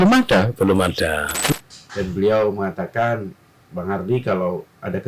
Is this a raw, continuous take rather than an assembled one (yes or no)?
no